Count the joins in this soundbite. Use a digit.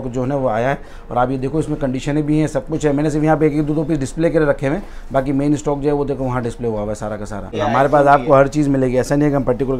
1